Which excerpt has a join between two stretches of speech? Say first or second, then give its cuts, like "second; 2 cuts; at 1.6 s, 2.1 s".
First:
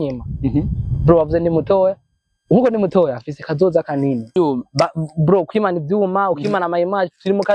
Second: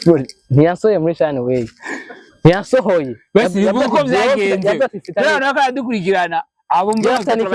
first; 1 cut; at 4.3 s